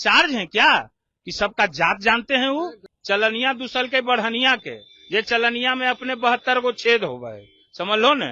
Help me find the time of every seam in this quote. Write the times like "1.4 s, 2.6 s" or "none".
2.9 s